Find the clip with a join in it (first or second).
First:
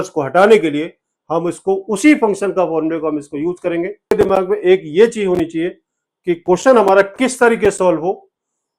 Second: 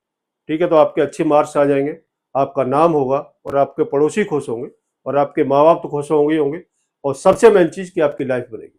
first